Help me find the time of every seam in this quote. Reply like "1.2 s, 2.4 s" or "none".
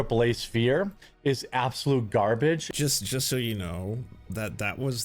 2.7 s